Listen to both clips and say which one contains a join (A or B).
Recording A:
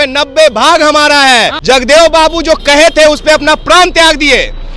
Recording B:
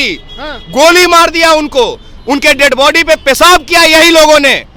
A